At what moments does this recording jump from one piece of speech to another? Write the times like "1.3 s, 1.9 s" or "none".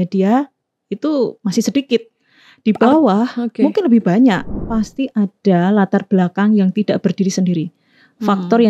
4.6 s